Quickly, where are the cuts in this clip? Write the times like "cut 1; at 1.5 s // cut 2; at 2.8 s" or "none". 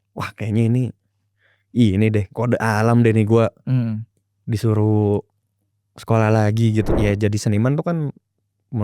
cut 1; at 6.9 s